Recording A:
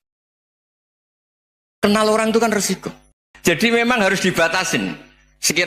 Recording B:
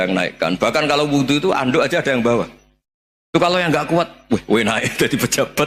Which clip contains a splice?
A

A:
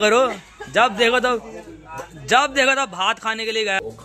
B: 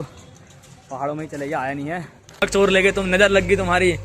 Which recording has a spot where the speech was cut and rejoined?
B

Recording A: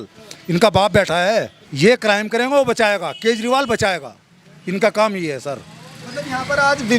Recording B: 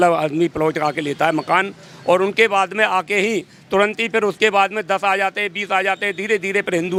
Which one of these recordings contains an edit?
A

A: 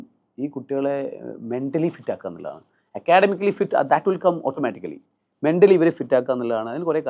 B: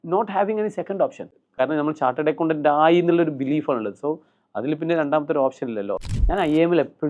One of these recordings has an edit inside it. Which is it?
B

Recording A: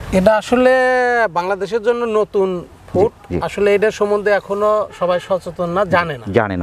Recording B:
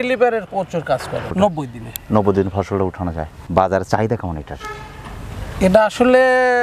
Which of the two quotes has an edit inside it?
B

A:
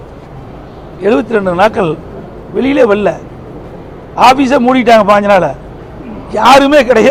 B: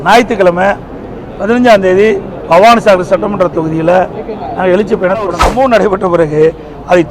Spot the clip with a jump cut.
B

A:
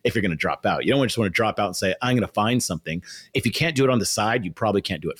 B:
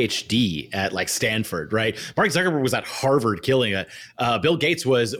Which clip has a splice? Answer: A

